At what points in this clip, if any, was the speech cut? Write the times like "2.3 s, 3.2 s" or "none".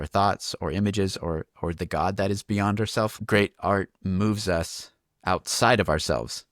none